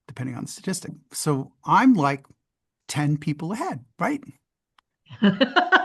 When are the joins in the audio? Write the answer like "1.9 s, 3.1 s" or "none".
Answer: 1.0 s